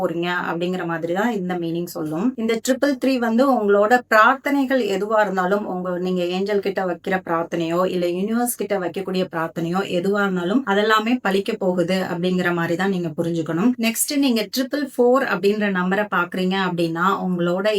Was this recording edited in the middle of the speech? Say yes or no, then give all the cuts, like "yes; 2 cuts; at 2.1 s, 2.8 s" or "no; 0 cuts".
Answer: no; 0 cuts